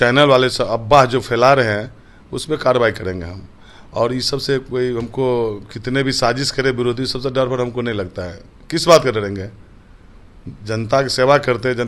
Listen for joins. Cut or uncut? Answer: uncut